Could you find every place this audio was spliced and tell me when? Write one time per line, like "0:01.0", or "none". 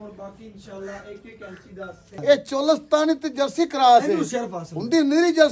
0:02.1